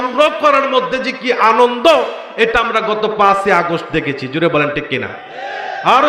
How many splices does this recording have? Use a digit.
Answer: 0